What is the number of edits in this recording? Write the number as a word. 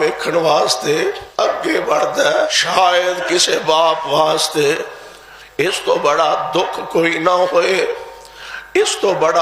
two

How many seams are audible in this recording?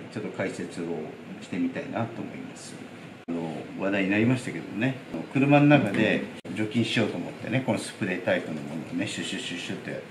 three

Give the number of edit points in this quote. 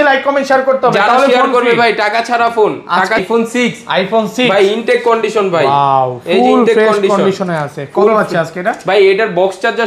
one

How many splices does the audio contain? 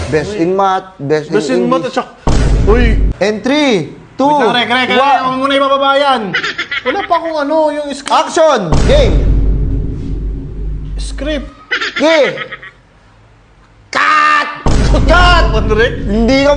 one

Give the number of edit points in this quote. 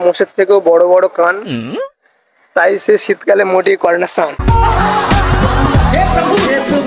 zero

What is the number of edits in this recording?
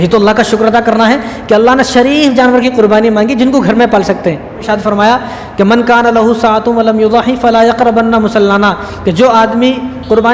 one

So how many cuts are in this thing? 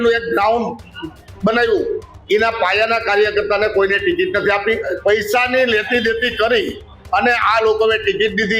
one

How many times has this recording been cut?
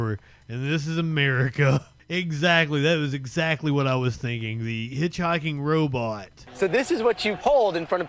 two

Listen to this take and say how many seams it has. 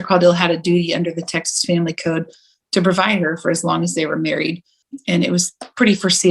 one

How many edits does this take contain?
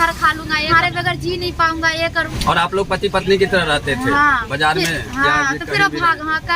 two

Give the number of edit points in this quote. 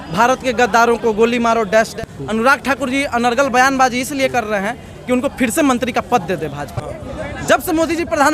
two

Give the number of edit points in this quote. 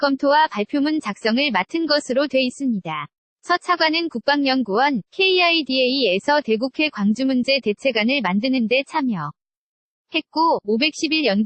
zero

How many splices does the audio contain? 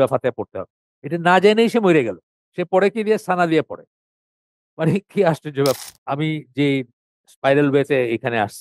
one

